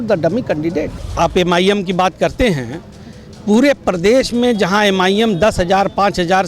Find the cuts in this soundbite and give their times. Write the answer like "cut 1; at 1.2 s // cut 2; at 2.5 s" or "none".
cut 1; at 1.0 s